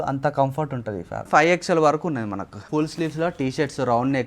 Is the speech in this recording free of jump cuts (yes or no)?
no